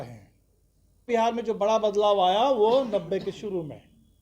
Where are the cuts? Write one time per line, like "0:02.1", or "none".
0:01.1